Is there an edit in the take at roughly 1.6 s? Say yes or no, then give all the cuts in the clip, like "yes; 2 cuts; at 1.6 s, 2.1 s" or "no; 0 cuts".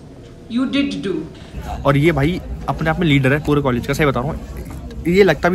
yes; 1 cut; at 1.6 s